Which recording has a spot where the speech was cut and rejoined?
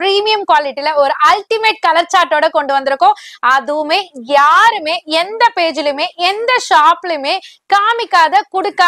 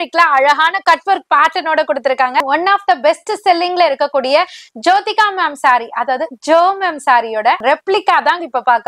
second; 2 cuts; at 2.4 s, 7.6 s

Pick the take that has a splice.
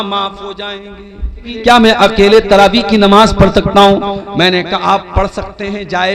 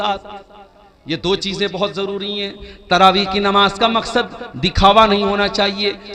first; 1 cut; at 1.5 s

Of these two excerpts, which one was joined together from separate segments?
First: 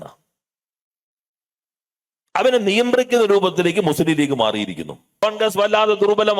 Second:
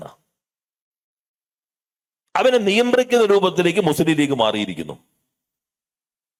first; 1 cut; at 5.2 s

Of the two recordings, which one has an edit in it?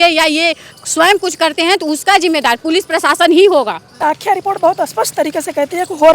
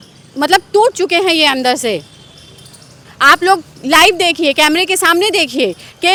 first; 1 cut; at 4.0 s

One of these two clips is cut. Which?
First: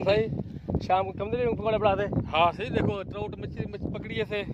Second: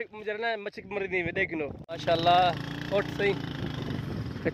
second; 1 cut; at 1.9 s

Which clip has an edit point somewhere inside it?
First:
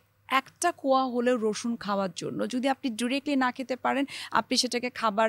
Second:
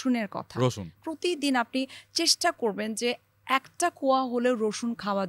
second; 1 cut; at 1.0 s

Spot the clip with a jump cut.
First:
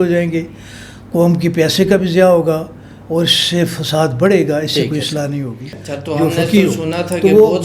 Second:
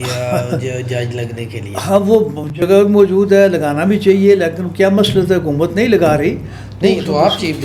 first; 1 cut; at 5.8 s

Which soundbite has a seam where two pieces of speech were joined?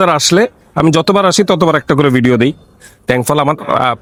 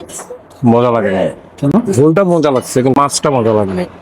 second; 1 cut; at 3.0 s

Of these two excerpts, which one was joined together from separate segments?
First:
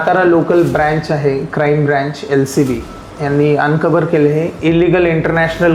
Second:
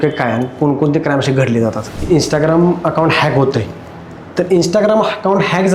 second; 1 cut; at 2.0 s

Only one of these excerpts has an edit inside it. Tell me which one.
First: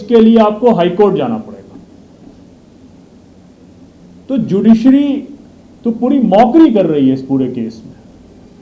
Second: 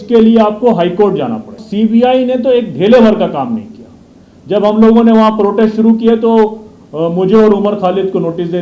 second; 1 cut; at 1.6 s

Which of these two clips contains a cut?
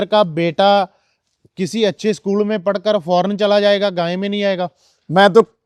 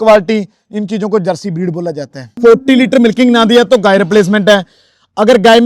second; 1 cut; at 2.3 s

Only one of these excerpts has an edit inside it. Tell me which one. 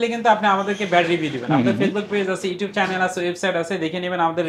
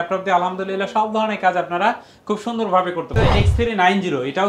second; 1 cut; at 3.1 s

